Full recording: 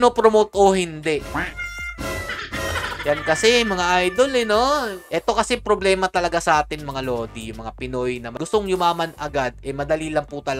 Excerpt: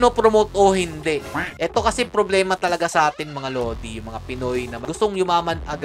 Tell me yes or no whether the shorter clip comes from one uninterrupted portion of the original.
no